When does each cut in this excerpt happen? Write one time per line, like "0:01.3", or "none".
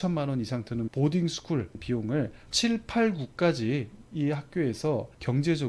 0:04.0